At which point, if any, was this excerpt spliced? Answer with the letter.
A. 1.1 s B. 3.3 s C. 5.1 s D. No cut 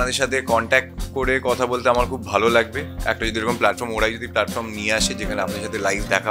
D